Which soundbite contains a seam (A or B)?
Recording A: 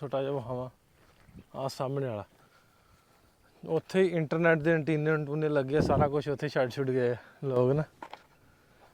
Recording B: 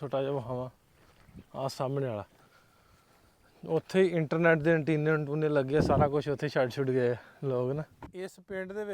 B